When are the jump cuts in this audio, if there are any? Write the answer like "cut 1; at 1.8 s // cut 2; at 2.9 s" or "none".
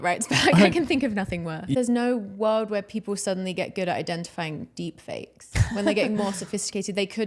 cut 1; at 1.6 s